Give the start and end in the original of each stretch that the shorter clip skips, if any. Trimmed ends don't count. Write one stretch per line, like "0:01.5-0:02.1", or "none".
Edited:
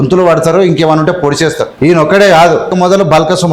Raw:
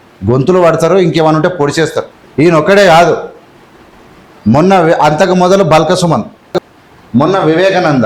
0:02.0-0:02.2
0:03.3-0:05.3